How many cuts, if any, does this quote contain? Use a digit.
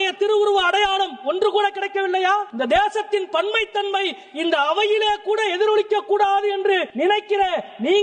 2